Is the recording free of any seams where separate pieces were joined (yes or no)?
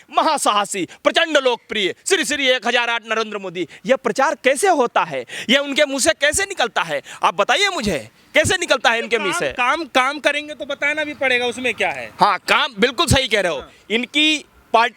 yes